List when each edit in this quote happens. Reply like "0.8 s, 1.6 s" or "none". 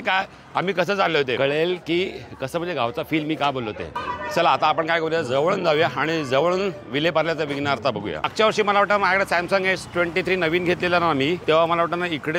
1.4 s, 4.0 s, 8.3 s, 11.4 s